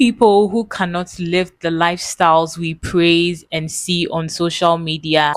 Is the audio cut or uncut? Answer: uncut